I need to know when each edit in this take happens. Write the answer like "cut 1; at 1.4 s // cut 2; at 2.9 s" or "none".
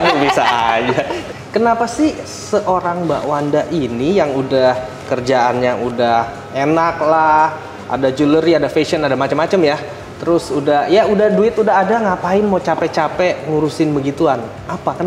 cut 1; at 1.2 s